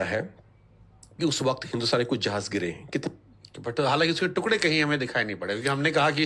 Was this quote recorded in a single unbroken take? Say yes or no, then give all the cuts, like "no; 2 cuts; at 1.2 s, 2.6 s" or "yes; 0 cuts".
no; 1 cut; at 3.1 s